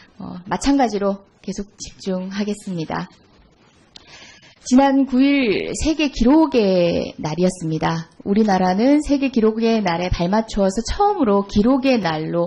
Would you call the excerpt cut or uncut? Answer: uncut